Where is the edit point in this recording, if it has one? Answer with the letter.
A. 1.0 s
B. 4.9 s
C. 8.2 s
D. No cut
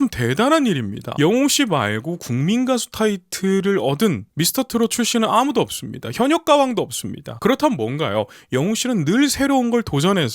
A